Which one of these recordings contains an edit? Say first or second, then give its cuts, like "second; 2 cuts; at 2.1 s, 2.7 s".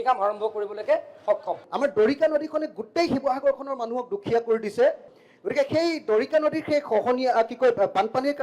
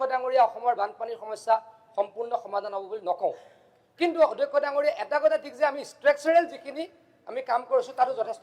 first; 2 cuts; at 1.6 s, 5.1 s